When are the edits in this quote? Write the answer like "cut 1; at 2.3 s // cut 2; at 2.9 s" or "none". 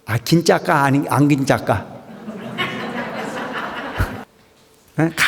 cut 1; at 4.3 s